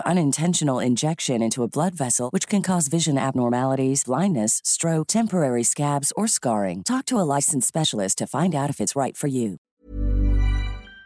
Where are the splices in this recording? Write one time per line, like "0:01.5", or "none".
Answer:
0:09.7